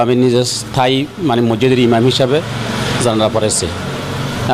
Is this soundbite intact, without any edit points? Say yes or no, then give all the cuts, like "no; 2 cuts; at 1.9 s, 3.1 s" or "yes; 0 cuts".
yes; 0 cuts